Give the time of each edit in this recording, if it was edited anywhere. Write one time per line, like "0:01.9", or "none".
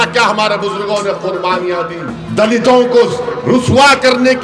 0:02.1

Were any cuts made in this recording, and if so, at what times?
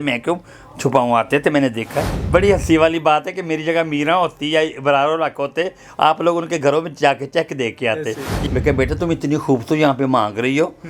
0:02.1
0:08.3

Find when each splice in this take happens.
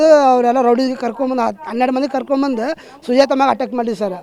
none

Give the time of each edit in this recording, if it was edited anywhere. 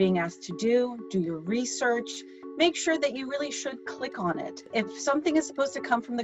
0:04.6

